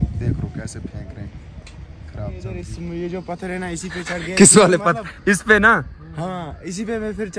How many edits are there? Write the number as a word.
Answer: one